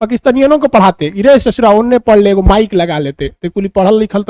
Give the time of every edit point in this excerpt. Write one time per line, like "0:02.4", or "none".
none